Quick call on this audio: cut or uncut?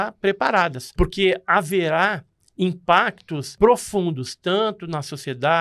cut